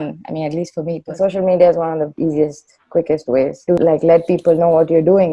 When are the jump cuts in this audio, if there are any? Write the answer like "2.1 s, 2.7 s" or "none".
1.1 s